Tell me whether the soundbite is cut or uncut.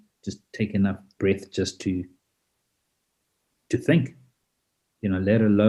uncut